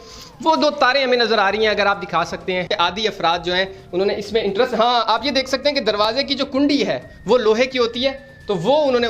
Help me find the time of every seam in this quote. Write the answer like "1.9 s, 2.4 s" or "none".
2.7 s